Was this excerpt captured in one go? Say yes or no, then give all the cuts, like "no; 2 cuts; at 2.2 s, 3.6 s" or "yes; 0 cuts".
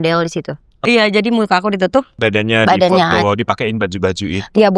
no; 2 cuts; at 0.8 s, 2.1 s